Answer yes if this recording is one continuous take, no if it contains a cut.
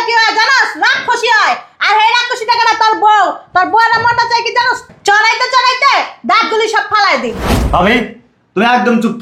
no